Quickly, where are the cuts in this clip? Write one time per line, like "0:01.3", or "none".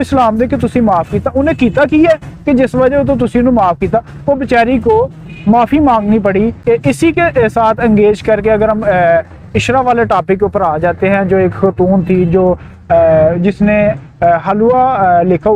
0:06.6